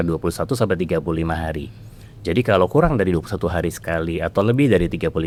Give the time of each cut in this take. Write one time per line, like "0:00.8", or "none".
none